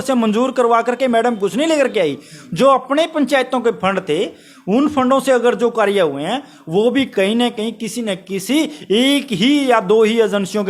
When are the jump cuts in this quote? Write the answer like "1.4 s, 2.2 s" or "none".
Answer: none